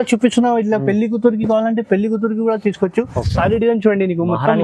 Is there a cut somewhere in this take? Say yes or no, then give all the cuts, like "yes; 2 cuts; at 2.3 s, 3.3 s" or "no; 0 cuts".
yes; 1 cut; at 3.2 s